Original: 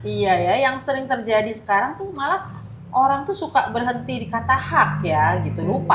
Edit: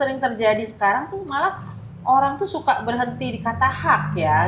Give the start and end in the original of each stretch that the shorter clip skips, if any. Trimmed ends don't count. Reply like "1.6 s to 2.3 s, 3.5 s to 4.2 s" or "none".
none